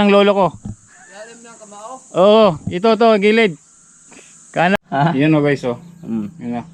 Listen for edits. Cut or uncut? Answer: cut